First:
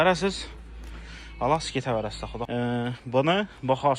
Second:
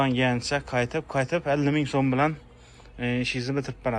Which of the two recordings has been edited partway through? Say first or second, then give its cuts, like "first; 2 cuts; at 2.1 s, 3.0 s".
first; 1 cut; at 2.3 s